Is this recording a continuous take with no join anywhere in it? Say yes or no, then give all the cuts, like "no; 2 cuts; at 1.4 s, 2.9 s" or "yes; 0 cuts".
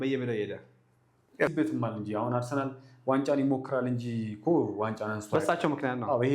no; 1 cut; at 1.5 s